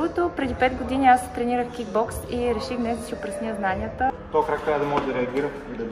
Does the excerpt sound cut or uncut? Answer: cut